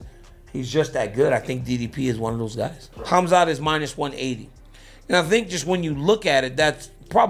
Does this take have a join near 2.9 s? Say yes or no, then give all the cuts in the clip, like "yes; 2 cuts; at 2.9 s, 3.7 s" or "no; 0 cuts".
yes; 1 cut; at 2.9 s